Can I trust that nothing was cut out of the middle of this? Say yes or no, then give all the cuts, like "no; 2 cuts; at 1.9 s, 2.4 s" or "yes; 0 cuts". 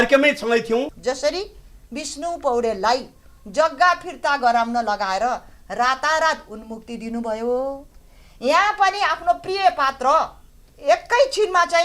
no; 2 cuts; at 0.9 s, 10.7 s